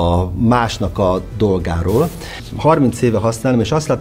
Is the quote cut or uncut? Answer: cut